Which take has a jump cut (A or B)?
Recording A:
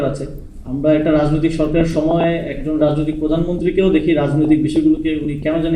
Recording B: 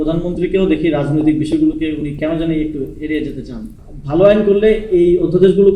B